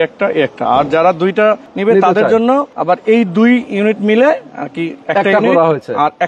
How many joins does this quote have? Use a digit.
3